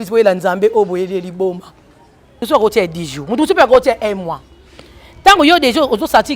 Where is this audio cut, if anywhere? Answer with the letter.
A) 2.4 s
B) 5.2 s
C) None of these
A